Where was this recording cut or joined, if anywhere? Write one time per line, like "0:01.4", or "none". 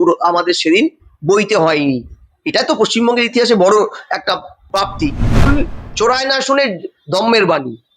0:05.5